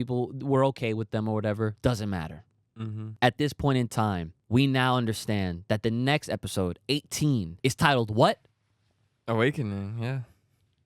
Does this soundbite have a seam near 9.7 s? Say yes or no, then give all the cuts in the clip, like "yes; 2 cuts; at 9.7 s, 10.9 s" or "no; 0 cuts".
no; 3 cuts; at 3.0 s, 4.3 s, 7.5 s